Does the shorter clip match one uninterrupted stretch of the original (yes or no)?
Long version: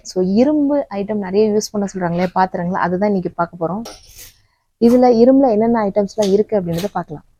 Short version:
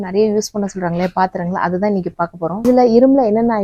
no